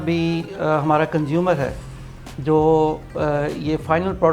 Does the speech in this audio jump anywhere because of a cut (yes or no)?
no